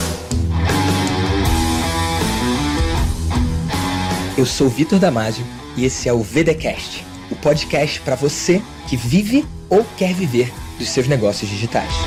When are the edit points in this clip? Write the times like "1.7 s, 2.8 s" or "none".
none